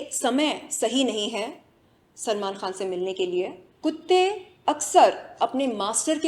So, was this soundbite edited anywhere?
yes; 1 cut; at 3.6 s

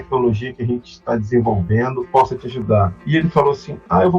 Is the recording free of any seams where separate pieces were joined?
no; 2 cuts; at 2.0 s, 3.0 s

